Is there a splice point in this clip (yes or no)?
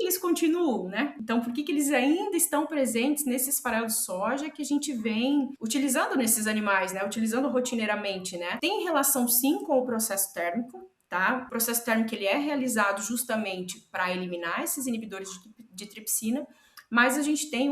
yes